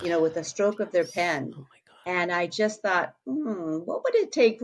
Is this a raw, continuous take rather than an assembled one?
yes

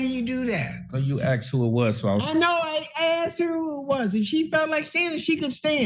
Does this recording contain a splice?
no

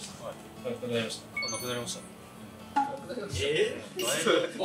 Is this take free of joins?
no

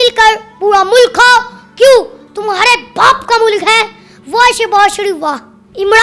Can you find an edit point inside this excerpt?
no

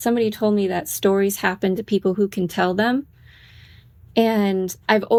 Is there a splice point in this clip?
no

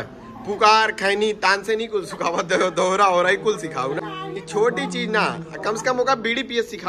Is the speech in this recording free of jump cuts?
no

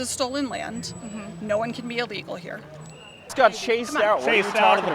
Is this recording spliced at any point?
yes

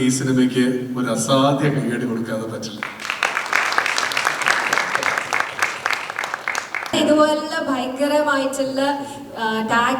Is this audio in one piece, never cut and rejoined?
no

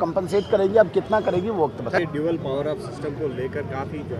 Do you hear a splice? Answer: yes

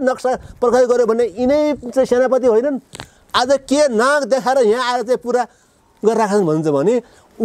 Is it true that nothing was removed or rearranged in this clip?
yes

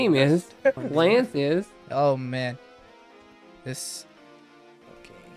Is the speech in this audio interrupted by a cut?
yes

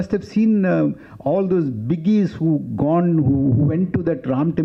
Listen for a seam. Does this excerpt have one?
no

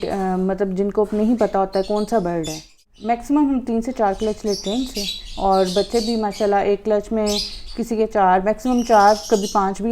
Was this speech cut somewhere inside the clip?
yes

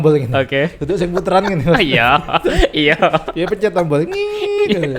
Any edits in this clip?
no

